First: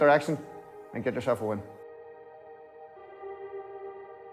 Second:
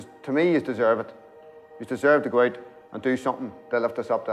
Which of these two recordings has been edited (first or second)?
first